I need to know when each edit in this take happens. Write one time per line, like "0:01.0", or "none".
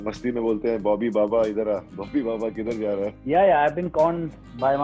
0:03.2